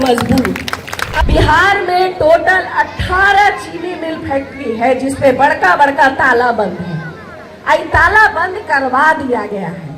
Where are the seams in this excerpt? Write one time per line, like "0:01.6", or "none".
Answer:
0:01.0